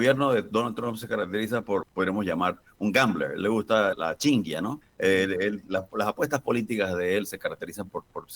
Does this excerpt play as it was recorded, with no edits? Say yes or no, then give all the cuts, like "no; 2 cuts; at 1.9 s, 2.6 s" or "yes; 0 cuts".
no; 3 cuts; at 1.9 s, 4.0 s, 4.8 s